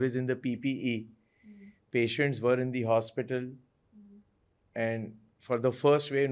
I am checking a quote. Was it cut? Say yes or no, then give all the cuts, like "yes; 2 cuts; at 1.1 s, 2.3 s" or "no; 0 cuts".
no; 0 cuts